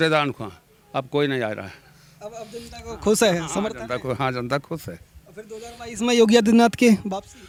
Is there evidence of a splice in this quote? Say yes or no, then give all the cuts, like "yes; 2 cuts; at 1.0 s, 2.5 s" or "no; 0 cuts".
no; 0 cuts